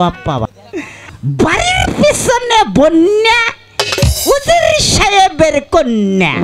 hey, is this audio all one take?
no; 1 cut; at 1.2 s

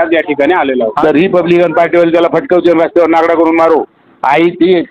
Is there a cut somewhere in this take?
yes; 1 cut; at 0.9 s

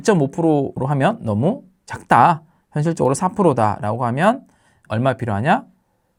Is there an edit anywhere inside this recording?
no; 0 cuts

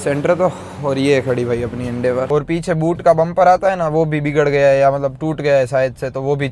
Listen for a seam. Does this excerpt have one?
yes; 1 cut; at 2.3 s

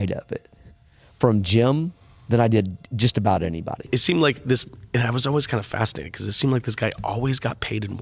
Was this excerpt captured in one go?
no; 1 cut; at 3.9 s

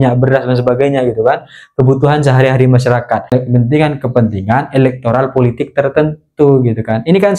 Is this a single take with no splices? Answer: no; 1 cut; at 3.3 s

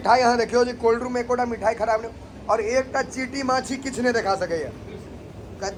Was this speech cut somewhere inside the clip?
no; 0 cuts

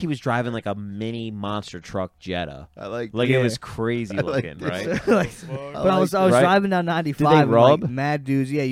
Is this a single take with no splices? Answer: yes; 0 cuts

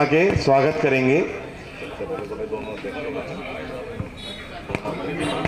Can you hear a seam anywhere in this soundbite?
no; 0 cuts

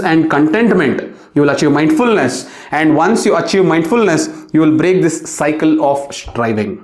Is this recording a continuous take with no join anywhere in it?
yes; 0 cuts

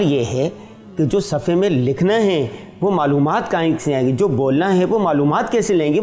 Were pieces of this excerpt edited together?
no; 0 cuts

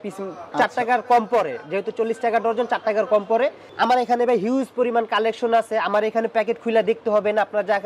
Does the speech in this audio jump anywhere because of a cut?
yes; 1 cut; at 3.6 s

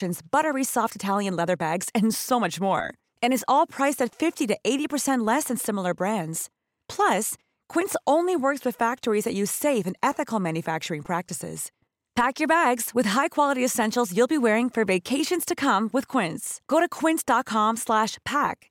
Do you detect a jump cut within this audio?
no; 0 cuts

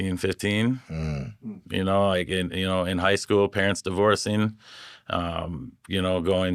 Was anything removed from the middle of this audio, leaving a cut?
no; 0 cuts

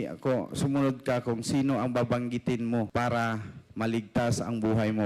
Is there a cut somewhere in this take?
yes; 1 cut; at 2.9 s

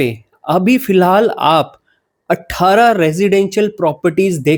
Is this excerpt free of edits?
yes; 0 cuts

